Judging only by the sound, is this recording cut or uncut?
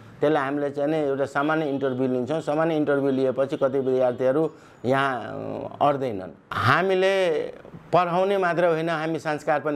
cut